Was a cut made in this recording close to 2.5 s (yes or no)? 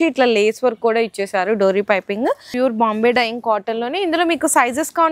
yes